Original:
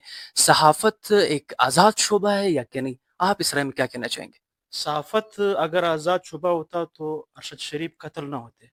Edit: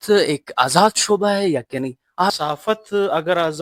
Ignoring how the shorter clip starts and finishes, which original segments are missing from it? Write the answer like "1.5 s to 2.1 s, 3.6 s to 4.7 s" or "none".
3.4 s to 4.8 s